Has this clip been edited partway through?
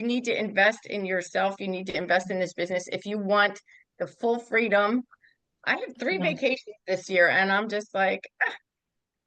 no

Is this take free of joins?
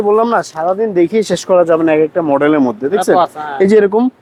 yes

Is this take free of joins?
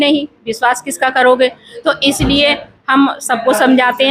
yes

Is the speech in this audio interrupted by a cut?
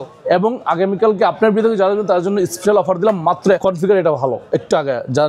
yes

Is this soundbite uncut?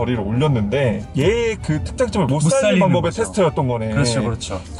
no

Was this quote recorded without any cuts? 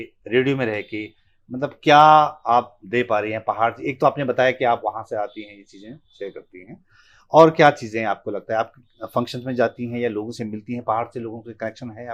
yes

